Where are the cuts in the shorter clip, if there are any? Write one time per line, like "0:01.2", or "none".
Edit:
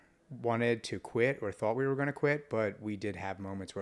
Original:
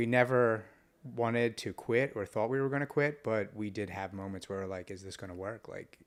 none